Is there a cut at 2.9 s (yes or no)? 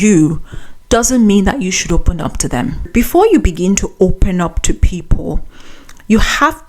yes